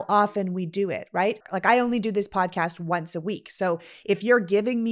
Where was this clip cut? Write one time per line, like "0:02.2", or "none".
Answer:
0:01.5